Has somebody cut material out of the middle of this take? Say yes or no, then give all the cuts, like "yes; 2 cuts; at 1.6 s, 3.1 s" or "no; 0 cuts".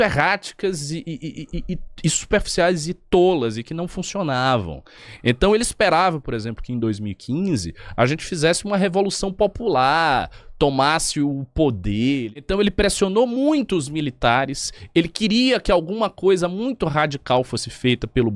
yes; 1 cut; at 12.5 s